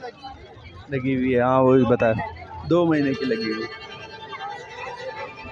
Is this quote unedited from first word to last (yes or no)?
yes